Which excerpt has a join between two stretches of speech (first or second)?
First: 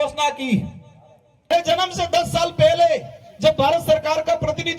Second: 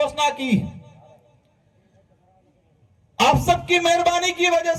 first